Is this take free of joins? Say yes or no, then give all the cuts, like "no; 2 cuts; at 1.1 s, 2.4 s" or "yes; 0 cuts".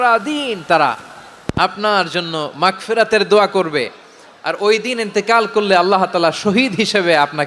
yes; 0 cuts